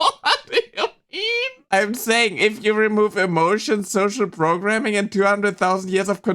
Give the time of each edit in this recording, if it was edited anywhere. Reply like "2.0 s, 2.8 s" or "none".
1.6 s